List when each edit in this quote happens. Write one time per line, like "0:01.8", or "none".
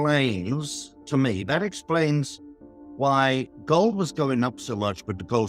none